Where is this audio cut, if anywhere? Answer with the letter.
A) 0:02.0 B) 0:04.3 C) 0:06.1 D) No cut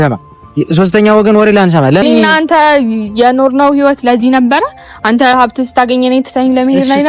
A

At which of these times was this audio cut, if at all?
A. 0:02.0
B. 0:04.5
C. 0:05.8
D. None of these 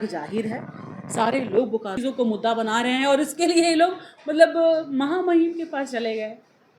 A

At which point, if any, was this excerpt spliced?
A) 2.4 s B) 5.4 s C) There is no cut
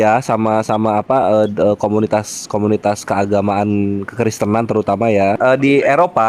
B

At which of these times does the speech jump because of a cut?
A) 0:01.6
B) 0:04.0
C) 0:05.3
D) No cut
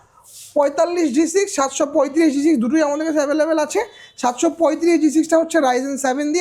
D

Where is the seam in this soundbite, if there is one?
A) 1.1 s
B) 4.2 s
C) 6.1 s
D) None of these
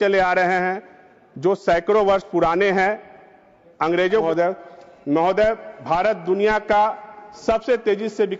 B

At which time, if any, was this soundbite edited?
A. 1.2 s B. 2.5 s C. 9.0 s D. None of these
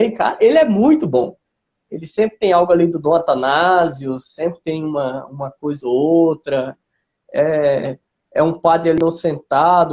C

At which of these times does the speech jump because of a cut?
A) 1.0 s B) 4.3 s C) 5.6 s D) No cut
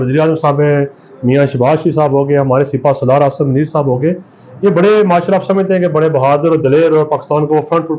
D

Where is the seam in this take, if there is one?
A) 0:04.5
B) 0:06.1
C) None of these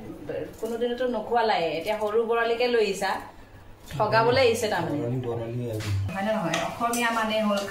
B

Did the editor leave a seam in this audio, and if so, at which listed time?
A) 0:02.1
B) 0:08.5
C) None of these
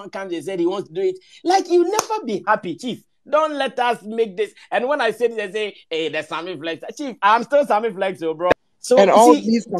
B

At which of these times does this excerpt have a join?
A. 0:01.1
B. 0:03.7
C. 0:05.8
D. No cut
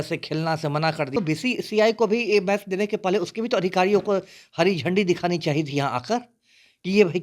A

